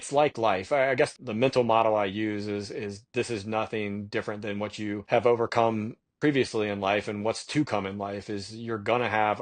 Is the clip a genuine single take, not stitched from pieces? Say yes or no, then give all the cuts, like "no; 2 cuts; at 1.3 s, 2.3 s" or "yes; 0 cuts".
no; 2 cuts; at 1.1 s, 5.0 s